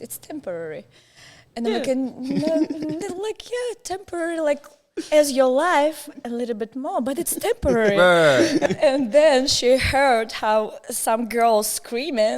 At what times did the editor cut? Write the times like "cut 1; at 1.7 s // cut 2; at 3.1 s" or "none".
cut 1; at 8.6 s